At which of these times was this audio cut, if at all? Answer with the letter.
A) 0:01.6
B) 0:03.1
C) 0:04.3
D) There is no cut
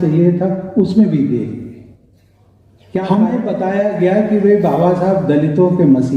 B